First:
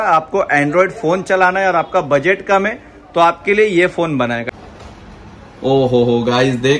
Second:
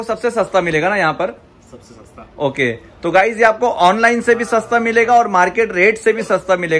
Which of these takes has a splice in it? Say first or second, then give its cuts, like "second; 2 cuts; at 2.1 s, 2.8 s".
first; 1 cut; at 4.5 s